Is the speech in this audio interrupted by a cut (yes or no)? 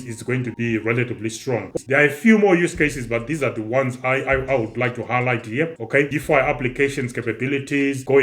yes